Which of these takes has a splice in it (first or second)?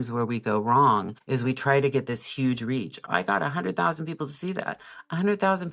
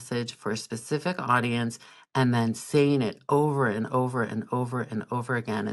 first